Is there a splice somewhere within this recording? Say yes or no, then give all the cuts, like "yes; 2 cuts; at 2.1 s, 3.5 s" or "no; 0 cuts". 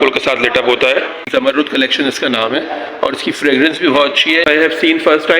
yes; 2 cuts; at 1.2 s, 4.5 s